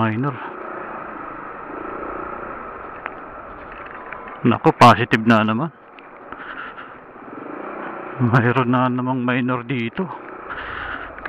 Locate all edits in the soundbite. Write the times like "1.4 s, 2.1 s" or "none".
none